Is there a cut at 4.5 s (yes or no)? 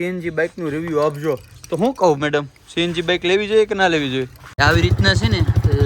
yes